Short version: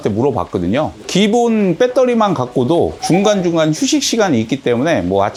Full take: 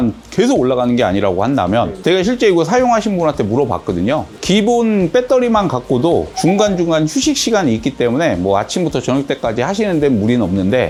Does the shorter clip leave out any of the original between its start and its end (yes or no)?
no